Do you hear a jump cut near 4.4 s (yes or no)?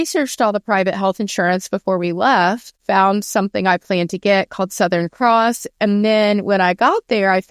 no